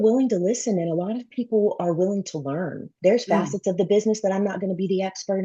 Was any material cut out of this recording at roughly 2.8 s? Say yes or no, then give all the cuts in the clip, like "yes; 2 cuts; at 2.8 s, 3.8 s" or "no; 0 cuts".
yes; 1 cut; at 2.8 s